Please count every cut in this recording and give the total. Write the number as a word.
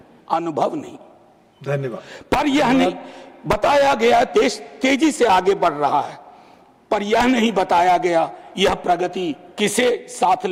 zero